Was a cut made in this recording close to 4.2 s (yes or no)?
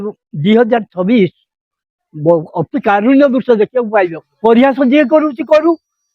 yes